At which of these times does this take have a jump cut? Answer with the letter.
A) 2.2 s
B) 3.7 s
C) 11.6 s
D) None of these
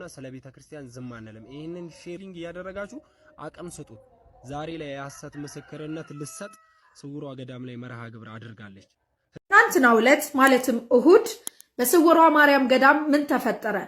A